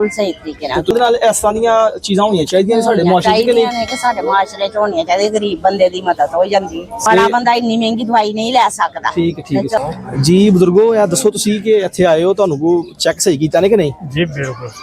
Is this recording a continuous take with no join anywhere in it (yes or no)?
no